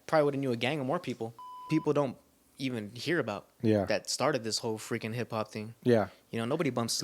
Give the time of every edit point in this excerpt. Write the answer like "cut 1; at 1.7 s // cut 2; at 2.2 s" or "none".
cut 1; at 1.6 s